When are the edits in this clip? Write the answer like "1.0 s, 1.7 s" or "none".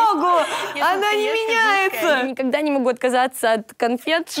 none